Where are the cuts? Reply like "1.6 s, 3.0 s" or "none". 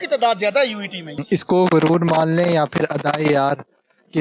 1.2 s

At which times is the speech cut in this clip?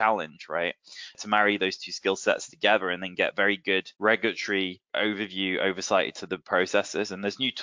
1.2 s, 3.9 s, 4.9 s

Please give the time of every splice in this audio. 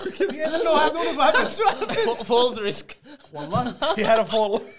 none

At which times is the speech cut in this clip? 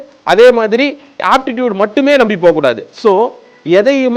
1.2 s

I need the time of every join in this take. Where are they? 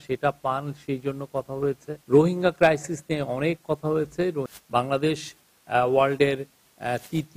1.9 s, 4.5 s

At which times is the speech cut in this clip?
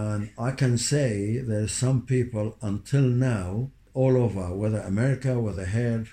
none

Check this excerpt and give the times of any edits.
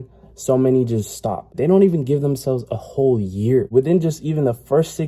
1.6 s, 3.7 s

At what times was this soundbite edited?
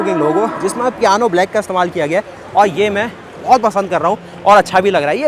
none

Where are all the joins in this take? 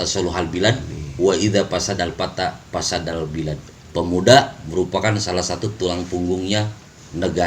none

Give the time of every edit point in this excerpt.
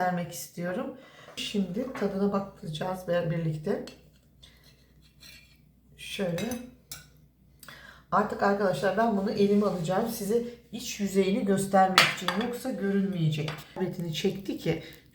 1.4 s, 13.6 s

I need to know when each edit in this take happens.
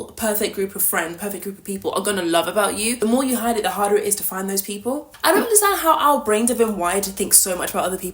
2.9 s, 5.1 s

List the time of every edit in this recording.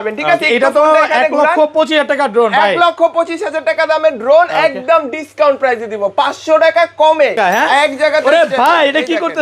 7.4 s

